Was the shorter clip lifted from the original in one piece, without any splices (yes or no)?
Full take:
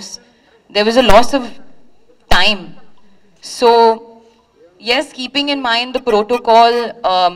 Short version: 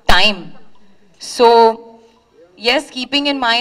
yes